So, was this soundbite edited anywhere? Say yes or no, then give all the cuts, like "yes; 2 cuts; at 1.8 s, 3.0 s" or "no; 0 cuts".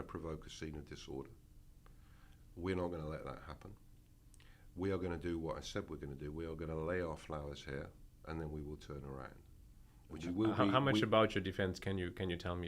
yes; 1 cut; at 10.1 s